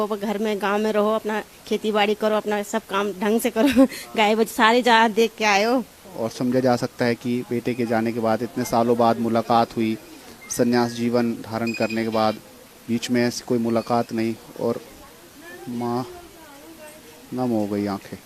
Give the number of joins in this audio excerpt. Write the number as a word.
one